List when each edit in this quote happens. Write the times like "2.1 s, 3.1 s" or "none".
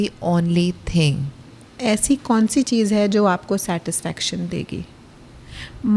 1.5 s